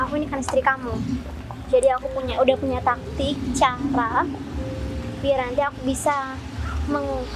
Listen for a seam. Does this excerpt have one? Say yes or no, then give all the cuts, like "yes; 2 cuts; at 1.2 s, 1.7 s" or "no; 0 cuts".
no; 0 cuts